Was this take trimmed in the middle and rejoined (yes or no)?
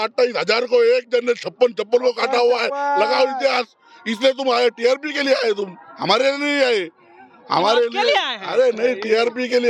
no